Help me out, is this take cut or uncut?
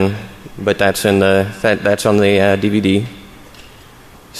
cut